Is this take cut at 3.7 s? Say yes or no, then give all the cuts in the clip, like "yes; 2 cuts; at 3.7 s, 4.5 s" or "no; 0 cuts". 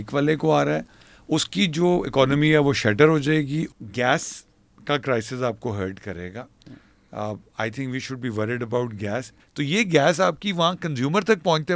yes; 2 cuts; at 3.7 s, 9.4 s